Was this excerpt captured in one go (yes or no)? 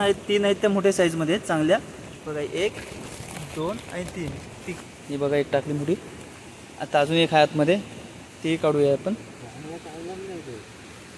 no